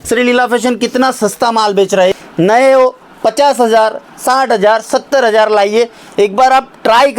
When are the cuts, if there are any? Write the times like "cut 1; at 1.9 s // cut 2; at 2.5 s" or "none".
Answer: cut 1; at 2.1 s